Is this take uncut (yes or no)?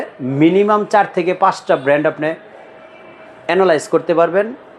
yes